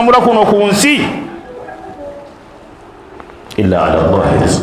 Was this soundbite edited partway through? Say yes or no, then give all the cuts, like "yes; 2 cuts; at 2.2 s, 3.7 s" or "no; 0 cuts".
no; 0 cuts